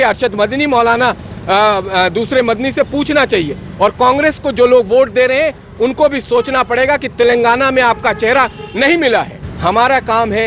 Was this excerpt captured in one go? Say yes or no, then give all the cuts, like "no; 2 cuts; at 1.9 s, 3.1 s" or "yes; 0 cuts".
no; 1 cut; at 9.4 s